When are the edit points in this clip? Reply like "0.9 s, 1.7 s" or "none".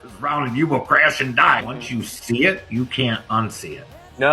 1.8 s